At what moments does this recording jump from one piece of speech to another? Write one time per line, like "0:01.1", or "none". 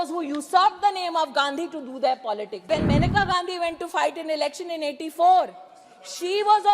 0:02.7